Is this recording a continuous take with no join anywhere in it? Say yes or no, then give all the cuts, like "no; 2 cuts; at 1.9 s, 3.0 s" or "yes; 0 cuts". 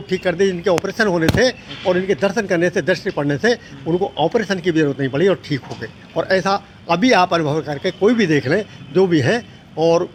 yes; 0 cuts